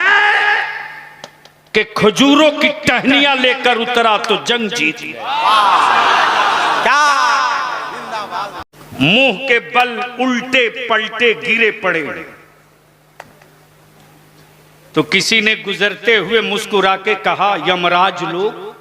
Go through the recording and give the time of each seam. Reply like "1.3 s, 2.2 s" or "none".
8.6 s